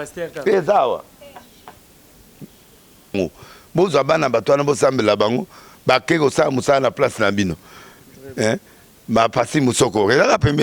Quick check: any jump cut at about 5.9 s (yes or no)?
no